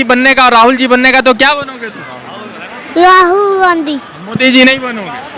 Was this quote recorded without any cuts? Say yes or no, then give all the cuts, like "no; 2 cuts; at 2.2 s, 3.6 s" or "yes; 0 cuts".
yes; 0 cuts